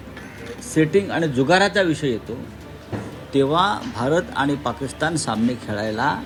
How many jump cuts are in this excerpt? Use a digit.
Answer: 0